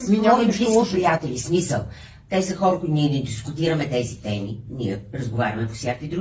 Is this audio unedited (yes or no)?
yes